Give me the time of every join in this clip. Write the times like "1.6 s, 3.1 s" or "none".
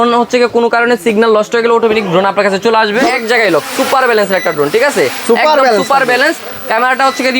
3.1 s